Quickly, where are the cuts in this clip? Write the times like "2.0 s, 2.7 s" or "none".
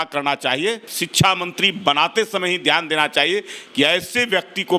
1.0 s